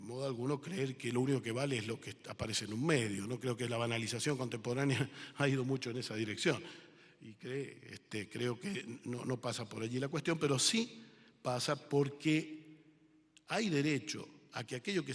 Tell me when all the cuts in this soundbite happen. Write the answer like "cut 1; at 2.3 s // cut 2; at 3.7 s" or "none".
cut 1; at 9.3 s